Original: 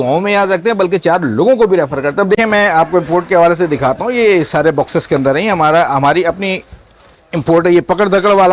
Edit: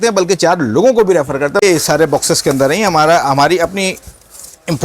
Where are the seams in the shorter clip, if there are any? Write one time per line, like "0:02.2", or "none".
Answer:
0:01.6